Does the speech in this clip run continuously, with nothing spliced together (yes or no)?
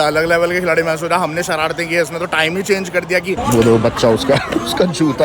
no